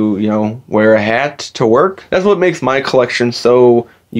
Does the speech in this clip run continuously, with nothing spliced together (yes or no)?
no